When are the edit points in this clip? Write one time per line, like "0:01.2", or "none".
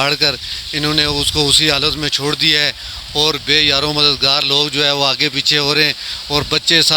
none